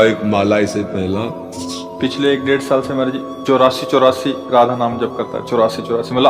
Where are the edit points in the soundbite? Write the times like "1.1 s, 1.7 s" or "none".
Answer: 1.9 s